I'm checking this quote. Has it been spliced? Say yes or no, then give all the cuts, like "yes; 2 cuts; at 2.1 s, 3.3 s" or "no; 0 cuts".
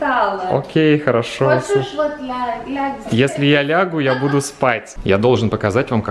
yes; 1 cut; at 4.9 s